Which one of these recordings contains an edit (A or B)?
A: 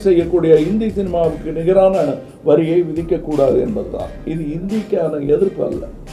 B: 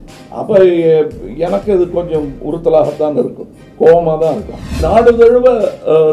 B